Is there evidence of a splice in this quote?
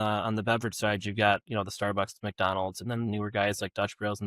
no; 0 cuts

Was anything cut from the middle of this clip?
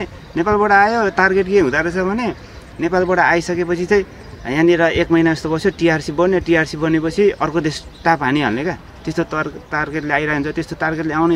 no; 0 cuts

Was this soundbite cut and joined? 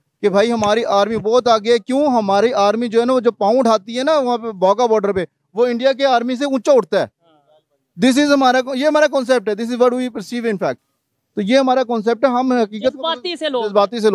no; 0 cuts

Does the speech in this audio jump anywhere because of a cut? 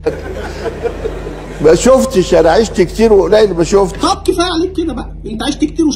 no; 0 cuts

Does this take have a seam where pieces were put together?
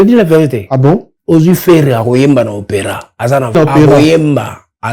yes; 2 cuts; at 1.1 s, 3.6 s

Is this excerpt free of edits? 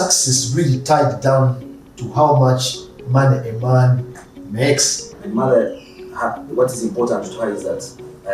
no; 1 cut; at 5.2 s

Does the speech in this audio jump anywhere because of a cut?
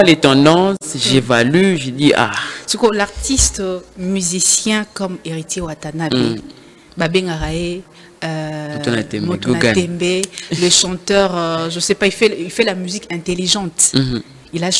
no; 0 cuts

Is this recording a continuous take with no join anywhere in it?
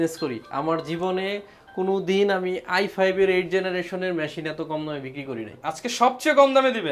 yes; 0 cuts

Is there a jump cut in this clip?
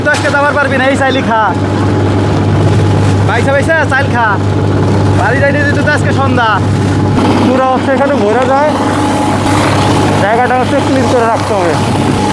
no; 0 cuts

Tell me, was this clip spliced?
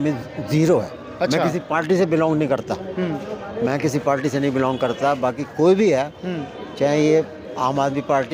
no; 0 cuts

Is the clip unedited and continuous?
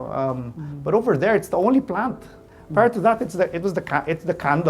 yes; 0 cuts

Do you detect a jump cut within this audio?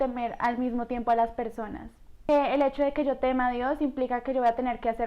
yes; 1 cut; at 2.2 s

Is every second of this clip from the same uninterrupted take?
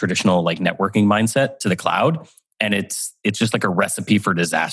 yes; 0 cuts

